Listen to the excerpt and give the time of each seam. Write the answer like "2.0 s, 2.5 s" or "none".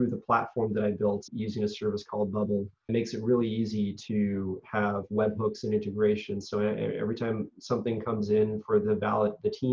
1.3 s, 2.9 s